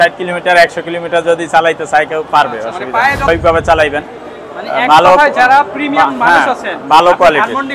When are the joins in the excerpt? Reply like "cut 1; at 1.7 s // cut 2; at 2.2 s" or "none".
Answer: cut 1; at 3.3 s